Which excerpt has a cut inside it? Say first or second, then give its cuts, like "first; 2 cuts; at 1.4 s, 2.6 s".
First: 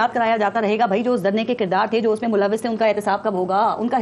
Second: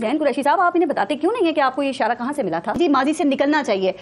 second; 1 cut; at 2.8 s